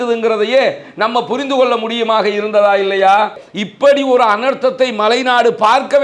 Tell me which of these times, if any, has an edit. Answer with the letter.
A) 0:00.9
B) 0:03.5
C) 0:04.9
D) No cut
B